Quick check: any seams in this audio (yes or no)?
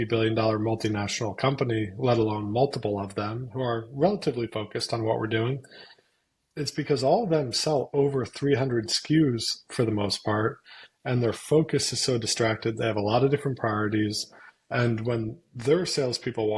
no